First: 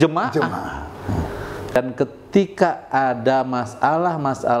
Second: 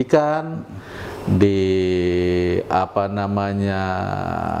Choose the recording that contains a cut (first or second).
first